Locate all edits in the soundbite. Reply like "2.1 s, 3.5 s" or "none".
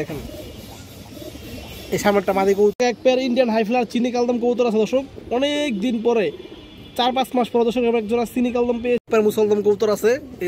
2.9 s, 9.1 s